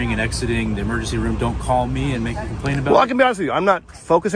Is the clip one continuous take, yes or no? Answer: yes